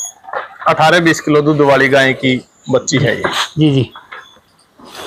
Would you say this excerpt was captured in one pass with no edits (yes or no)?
yes